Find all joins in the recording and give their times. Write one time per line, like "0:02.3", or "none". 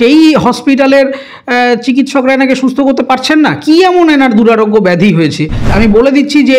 0:05.7